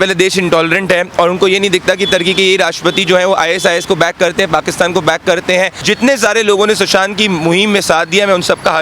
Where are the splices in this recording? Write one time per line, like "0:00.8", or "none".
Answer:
0:05.8